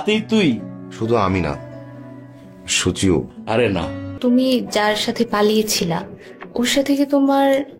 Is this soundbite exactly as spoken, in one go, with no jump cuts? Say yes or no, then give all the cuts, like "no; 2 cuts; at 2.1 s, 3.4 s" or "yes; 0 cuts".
no; 1 cut; at 4.2 s